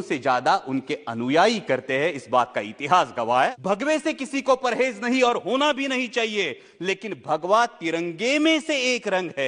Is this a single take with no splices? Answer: no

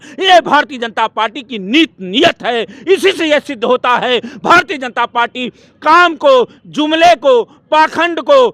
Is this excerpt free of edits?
yes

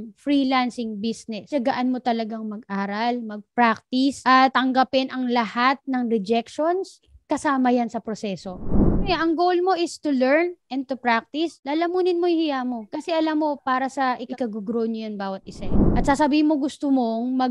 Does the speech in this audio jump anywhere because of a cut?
yes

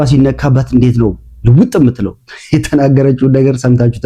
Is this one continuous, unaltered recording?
yes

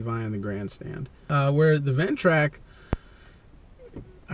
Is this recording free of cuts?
no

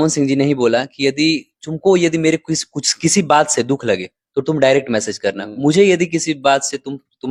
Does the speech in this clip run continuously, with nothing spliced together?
yes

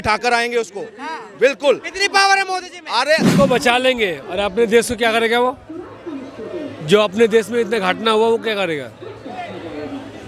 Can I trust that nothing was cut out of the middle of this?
no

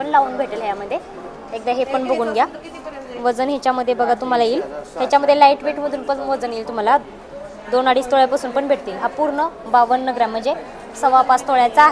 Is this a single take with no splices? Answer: yes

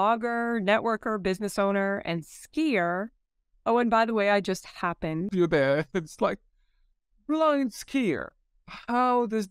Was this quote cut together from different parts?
yes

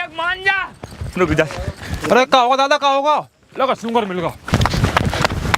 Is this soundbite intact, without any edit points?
no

